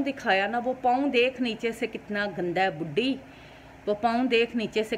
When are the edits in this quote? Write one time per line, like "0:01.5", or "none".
none